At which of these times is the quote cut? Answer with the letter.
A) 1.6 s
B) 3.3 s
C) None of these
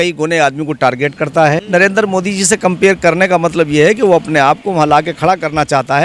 A